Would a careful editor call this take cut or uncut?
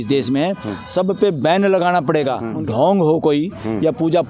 cut